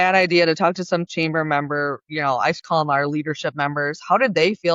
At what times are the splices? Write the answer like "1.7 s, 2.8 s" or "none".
none